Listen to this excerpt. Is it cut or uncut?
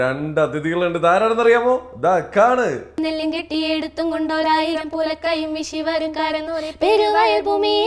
cut